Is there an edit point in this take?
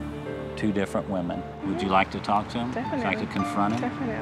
yes; 1 cut; at 1.5 s

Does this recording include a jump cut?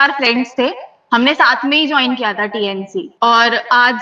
yes; 1 cut; at 3.1 s

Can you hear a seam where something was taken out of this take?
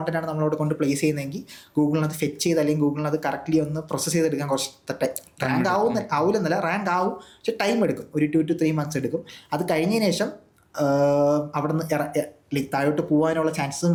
no; 0 cuts

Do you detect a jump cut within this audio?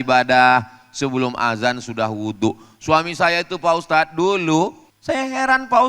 yes; 1 cut; at 4.9 s

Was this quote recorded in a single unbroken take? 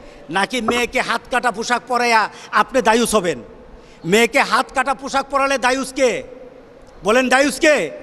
yes; 0 cuts

